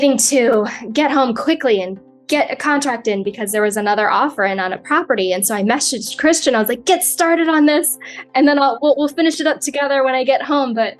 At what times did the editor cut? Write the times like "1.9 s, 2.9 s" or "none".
6.1 s